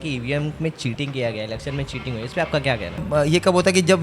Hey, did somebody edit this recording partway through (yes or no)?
yes